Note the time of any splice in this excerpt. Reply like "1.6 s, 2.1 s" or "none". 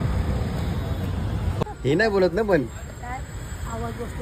1.5 s